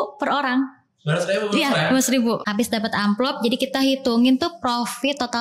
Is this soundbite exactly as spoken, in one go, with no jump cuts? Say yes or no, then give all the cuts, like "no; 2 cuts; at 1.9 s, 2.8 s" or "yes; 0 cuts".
no; 1 cut; at 2.5 s